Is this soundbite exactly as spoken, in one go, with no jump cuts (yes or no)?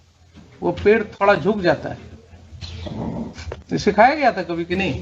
no